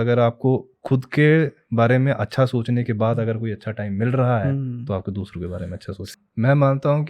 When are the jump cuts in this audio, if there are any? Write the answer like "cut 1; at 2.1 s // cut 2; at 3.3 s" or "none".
cut 1; at 6.0 s